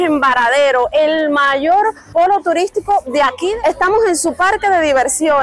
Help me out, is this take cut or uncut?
cut